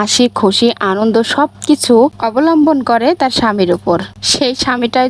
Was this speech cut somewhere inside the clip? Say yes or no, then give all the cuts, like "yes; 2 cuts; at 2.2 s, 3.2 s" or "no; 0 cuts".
no; 0 cuts